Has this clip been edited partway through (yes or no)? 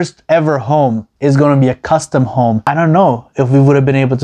yes